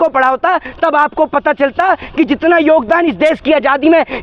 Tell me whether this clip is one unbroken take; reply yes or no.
yes